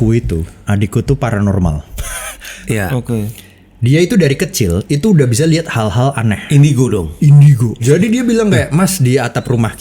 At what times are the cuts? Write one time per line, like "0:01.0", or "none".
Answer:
0:02.7
0:07.8